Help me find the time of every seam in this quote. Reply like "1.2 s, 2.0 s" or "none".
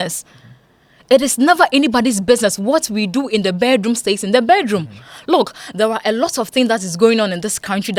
none